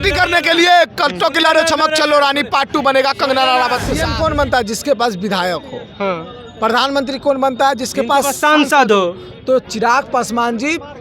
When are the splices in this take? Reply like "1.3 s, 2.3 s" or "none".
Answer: 4.0 s